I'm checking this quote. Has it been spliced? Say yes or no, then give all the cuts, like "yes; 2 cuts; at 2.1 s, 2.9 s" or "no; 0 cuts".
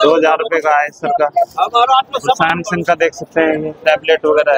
no; 0 cuts